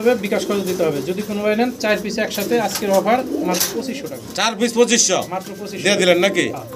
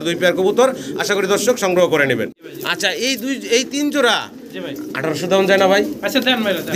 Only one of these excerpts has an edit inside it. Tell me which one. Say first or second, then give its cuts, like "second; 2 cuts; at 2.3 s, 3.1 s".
second; 1 cut; at 2.4 s